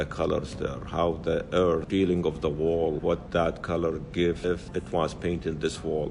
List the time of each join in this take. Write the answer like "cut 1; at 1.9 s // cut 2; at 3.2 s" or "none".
cut 1; at 1.9 s // cut 2; at 3.1 s // cut 3; at 4.5 s